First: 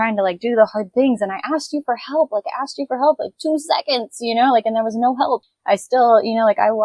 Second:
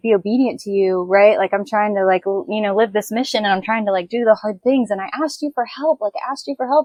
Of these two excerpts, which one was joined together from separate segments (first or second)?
first